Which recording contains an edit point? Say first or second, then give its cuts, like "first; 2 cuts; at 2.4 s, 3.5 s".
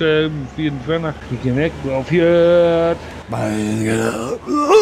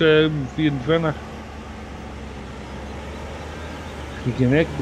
first; 1 cut; at 1.3 s